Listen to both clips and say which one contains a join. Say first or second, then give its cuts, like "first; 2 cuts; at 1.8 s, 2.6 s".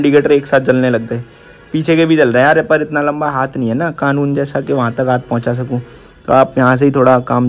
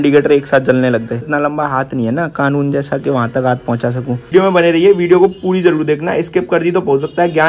second; 2 cuts; at 1.3 s, 4.3 s